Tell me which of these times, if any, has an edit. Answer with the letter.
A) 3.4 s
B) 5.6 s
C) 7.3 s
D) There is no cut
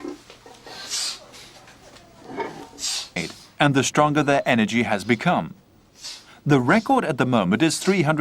A